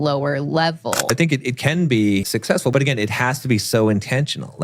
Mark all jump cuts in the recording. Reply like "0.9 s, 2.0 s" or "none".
1.1 s, 2.6 s